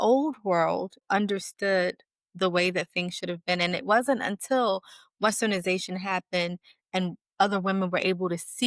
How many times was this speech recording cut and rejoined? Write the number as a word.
one